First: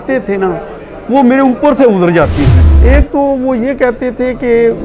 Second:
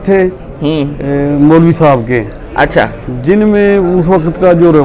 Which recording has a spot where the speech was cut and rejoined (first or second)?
first